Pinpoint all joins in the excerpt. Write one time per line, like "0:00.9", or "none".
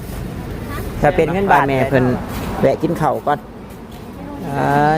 0:01.6